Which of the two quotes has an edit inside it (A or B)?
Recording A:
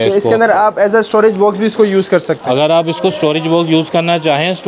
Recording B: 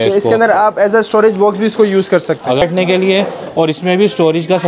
B